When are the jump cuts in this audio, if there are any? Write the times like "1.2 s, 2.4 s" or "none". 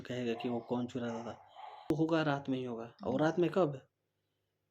1.9 s